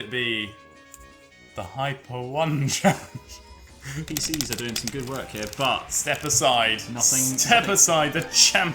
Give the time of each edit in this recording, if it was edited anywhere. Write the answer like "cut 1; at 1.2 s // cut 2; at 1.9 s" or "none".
cut 1; at 4.0 s